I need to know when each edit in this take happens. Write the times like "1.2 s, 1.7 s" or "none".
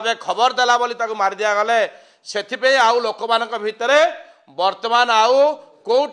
none